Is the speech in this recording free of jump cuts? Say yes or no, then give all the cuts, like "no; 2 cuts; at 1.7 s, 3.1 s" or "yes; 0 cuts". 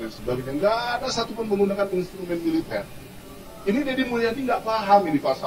yes; 0 cuts